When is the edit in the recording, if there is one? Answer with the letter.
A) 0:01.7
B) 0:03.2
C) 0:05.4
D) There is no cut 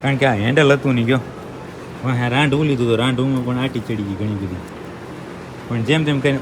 D